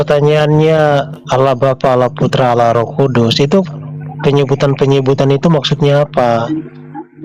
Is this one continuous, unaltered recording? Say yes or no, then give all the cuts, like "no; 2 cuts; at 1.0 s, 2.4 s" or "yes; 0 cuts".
yes; 0 cuts